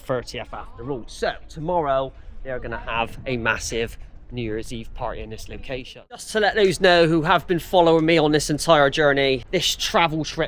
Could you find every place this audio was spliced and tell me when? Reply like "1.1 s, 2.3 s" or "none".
6.3 s, 9.4 s